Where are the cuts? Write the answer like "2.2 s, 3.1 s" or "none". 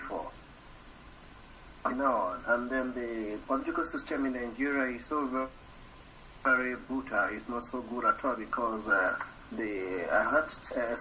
7.8 s